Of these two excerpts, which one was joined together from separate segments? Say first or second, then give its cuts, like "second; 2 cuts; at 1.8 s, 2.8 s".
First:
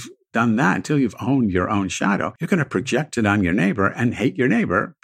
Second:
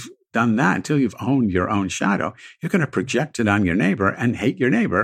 first; 1 cut; at 2.3 s